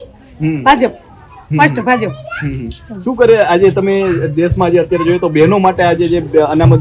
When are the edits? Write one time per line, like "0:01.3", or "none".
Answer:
none

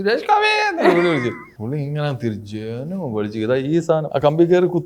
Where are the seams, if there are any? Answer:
0:01.5
0:04.1

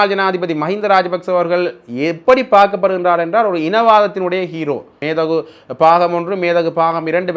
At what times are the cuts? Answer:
0:05.0

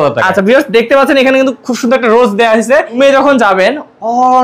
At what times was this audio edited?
0:03.0

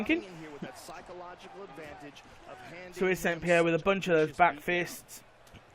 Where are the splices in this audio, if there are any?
0:03.3

